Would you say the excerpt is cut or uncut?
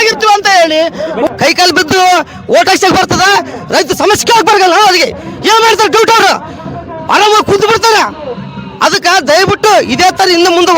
cut